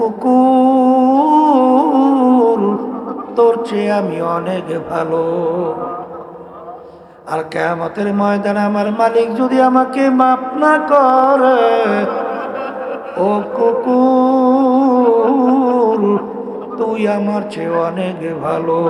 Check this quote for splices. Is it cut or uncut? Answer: uncut